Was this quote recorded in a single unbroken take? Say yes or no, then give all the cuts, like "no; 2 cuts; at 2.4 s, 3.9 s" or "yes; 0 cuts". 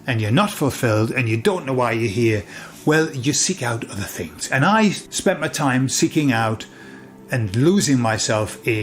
no; 1 cut; at 5.1 s